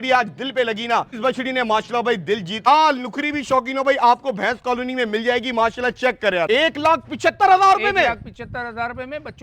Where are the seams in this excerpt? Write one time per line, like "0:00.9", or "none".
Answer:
0:01.1
0:02.6
0:06.5